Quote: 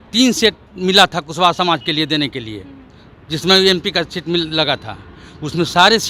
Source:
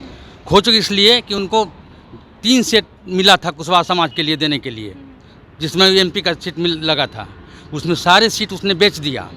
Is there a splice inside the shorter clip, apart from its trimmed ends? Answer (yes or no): no